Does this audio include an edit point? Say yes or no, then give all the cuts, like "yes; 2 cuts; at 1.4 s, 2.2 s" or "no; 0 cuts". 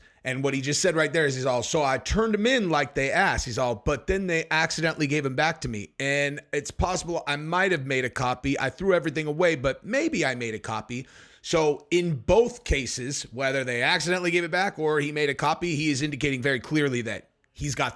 no; 0 cuts